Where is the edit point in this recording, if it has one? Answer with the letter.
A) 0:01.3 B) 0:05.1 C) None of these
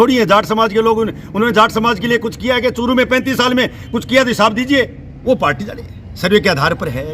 B